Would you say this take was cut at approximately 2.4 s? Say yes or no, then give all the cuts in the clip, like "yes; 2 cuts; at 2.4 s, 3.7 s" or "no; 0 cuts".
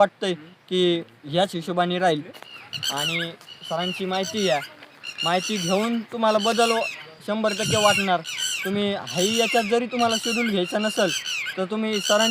yes; 1 cut; at 2.4 s